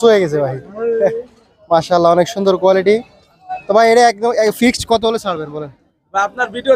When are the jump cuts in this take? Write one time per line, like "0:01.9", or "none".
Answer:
none